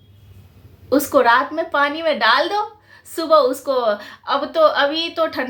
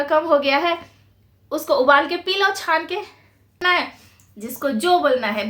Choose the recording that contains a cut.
second; 1 cut; at 3.6 s

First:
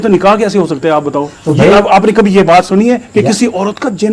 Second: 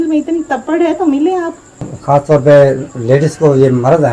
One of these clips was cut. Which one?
second; 1 cut; at 1.9 s

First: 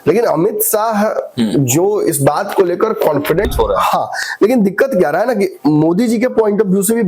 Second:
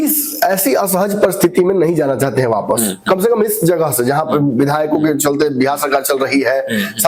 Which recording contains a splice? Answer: first; 1 cut; at 3.5 s

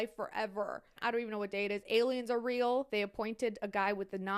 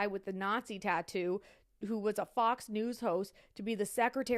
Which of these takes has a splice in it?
first; 2 cuts; at 1.0 s, 2.9 s

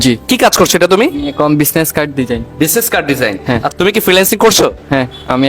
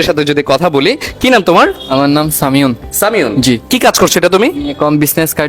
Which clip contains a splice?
first; 1 cut; at 3.7 s

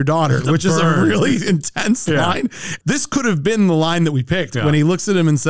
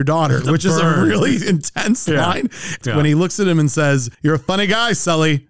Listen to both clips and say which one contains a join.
second; 1 cut; at 2.8 s

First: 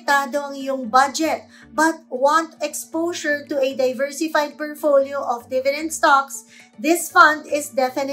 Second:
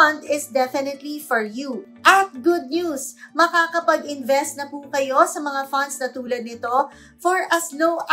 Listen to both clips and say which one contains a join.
second; 1 cut; at 1.8 s

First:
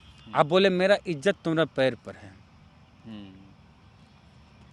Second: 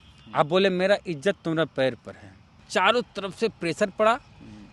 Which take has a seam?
second; 1 cut; at 2.7 s

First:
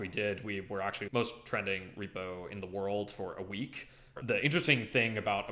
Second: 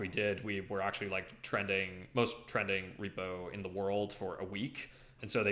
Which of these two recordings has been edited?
first; 2 cuts; at 1.1 s, 4.2 s

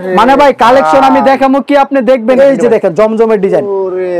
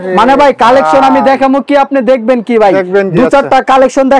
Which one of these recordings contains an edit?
first; 1 cut; at 2.4 s

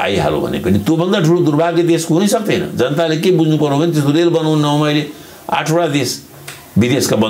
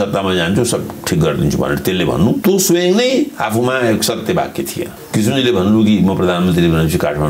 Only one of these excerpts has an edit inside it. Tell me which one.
second; 2 cuts; at 2.4 s, 5.0 s

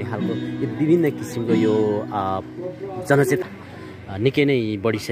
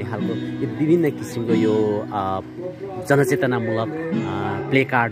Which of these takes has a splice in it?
first; 1 cut; at 3.4 s

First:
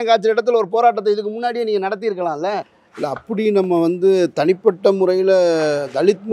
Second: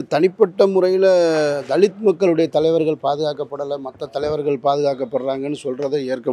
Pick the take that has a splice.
first; 1 cut; at 2.7 s

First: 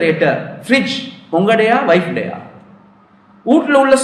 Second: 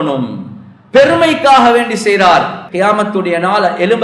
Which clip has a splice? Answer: second; 1 cut; at 2.6 s

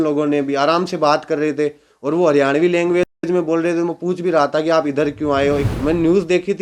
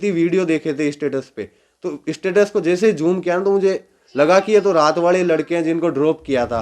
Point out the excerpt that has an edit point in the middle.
first; 1 cut; at 5.7 s

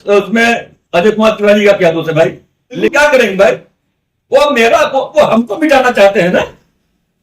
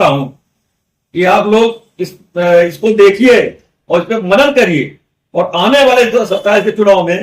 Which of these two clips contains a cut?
first; 1 cut; at 2.8 s

